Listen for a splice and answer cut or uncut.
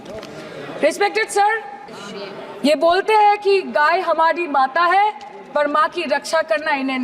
cut